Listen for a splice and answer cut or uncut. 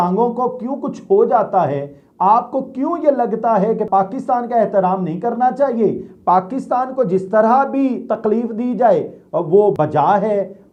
uncut